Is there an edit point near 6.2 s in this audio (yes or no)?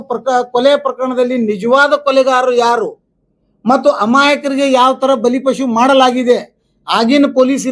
no